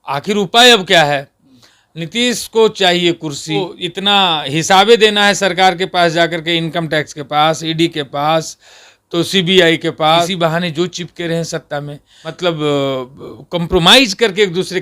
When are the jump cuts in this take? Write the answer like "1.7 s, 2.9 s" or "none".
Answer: 3.7 s, 10.3 s, 12.5 s